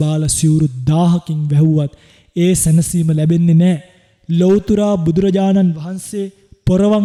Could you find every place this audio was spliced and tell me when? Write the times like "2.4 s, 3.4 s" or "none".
none